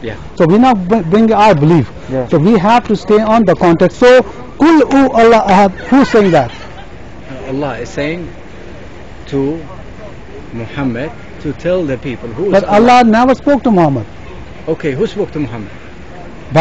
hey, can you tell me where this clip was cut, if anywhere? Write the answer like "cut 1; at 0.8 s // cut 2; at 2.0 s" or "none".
none